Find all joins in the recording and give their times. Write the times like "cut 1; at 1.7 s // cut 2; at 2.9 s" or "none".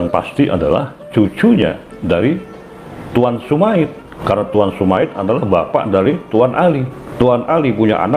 cut 1; at 4.1 s // cut 2; at 7.0 s